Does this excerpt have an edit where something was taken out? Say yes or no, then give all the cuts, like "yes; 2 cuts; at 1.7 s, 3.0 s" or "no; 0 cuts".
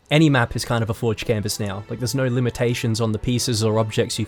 no; 0 cuts